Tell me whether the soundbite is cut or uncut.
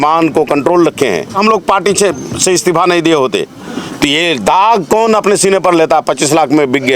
cut